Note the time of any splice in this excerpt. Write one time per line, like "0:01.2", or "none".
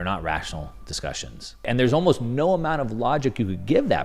0:01.6